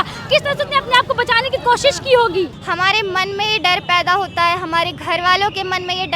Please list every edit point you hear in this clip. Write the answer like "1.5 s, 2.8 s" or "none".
2.6 s